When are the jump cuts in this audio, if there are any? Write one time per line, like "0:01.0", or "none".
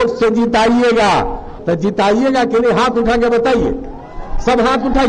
0:01.5